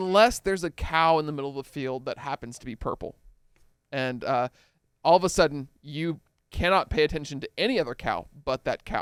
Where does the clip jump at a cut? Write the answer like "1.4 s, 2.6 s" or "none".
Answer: none